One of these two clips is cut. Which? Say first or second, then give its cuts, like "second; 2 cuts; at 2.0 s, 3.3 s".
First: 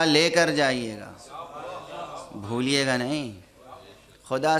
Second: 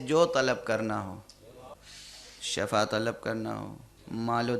second; 1 cut; at 1.7 s